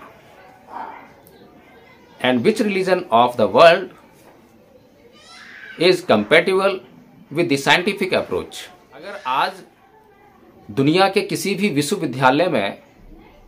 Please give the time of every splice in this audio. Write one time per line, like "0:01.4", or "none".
0:09.1